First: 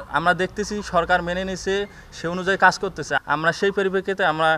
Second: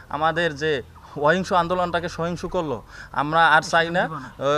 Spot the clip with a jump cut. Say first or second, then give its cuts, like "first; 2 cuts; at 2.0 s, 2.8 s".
first; 1 cut; at 3.1 s